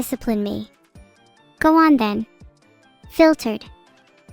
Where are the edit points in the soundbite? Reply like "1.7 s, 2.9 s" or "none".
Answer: none